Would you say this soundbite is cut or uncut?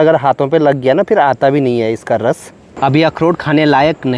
uncut